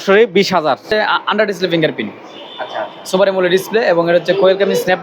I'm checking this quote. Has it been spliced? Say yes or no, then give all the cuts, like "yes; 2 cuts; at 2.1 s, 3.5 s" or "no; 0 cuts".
yes; 1 cut; at 0.9 s